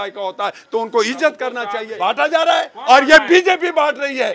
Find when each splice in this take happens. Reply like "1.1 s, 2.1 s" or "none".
1.8 s